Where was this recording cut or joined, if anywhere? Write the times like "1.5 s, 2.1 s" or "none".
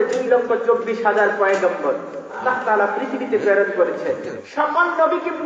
2.4 s, 4.4 s